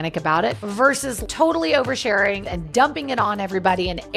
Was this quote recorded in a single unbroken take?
no; 2 cuts; at 1.2 s, 2.5 s

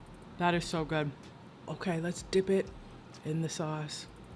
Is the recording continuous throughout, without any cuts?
no; 1 cut; at 1.7 s

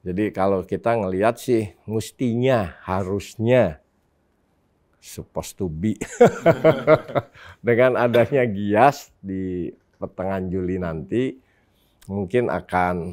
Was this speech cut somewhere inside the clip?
no; 0 cuts

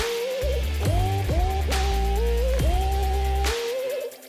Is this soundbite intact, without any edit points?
yes; 0 cuts

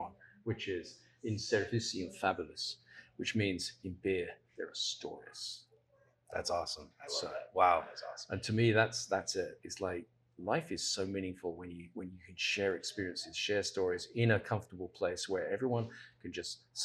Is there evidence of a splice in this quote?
no; 0 cuts

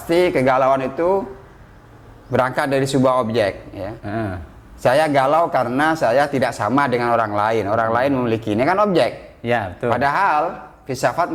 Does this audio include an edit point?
no; 0 cuts

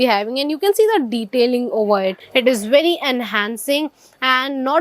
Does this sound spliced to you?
yes; 1 cut; at 2.1 s

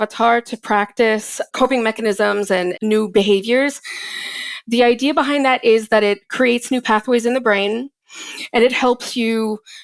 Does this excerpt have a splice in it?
yes; 2 cuts; at 1.5 s, 2.7 s

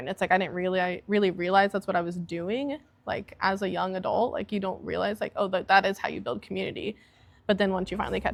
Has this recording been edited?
no; 0 cuts

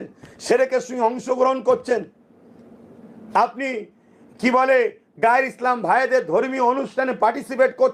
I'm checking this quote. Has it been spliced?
no; 0 cuts

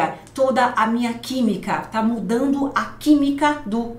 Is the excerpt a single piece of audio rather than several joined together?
yes; 0 cuts

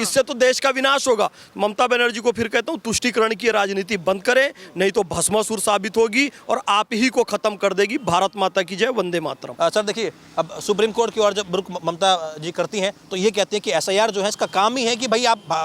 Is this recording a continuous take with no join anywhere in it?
yes; 0 cuts

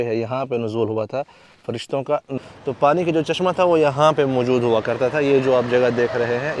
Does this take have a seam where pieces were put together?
yes; 1 cut; at 2.3 s

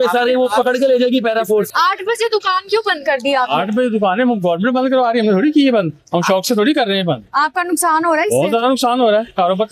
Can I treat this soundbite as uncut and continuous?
yes; 0 cuts

